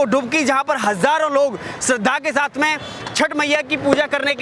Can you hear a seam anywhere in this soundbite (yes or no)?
no